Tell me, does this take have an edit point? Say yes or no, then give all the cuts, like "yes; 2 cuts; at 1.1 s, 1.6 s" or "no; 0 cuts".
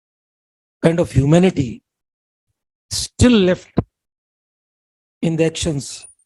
no; 0 cuts